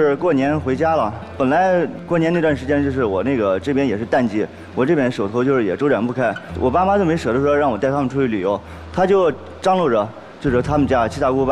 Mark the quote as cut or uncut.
uncut